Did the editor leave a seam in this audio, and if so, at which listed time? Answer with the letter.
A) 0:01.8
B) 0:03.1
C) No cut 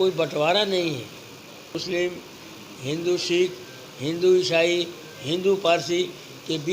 A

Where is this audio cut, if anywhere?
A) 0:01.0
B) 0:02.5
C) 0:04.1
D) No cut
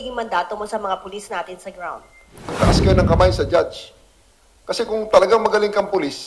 B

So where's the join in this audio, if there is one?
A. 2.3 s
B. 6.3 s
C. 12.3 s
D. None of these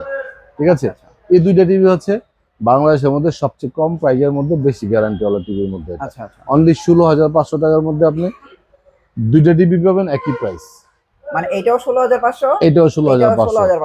D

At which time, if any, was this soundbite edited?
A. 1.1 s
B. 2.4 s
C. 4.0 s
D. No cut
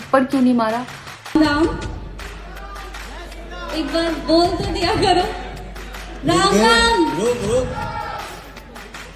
A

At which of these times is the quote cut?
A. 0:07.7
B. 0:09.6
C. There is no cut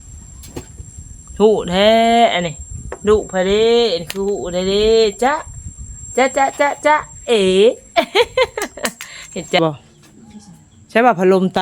B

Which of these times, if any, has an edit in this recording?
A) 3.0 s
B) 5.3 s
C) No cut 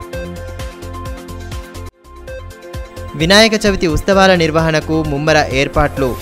A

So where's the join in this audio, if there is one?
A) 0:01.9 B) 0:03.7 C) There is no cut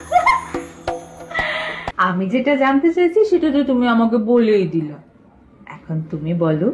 A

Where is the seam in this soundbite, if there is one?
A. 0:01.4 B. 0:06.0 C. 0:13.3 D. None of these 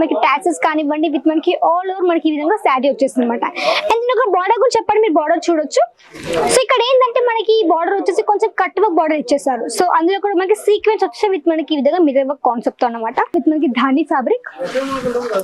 C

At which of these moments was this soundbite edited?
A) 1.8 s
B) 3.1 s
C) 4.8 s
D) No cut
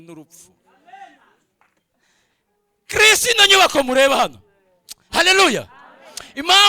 A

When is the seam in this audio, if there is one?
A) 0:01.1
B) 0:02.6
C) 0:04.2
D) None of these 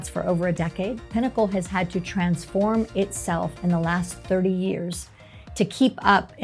A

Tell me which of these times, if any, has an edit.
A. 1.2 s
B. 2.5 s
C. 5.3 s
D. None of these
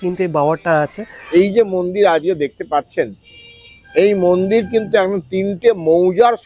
A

